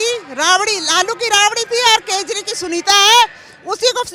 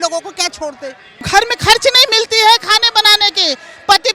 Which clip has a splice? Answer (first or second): second